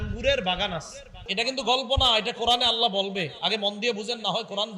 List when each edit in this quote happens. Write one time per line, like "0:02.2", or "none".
0:01.2